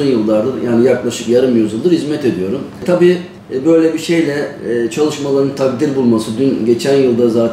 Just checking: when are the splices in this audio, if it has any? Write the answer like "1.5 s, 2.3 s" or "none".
3.2 s